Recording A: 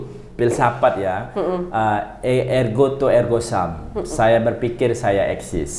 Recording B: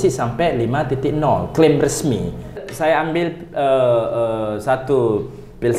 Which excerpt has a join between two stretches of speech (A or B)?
B